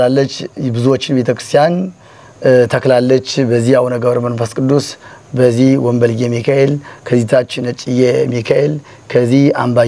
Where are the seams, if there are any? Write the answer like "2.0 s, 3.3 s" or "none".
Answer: none